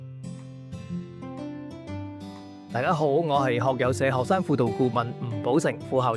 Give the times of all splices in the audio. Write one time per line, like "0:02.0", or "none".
0:02.7